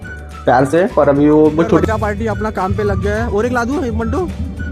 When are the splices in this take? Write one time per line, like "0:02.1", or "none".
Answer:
0:01.7